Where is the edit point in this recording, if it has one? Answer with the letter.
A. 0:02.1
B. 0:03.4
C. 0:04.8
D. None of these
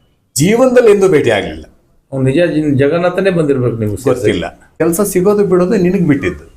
C